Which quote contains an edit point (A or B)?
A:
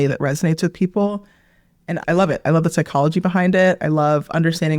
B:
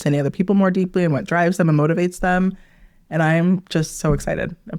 A